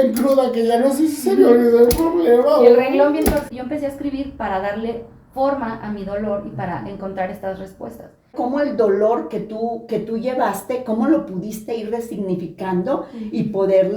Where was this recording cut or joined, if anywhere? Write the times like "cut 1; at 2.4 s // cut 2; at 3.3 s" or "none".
cut 1; at 3.4 s // cut 2; at 8.3 s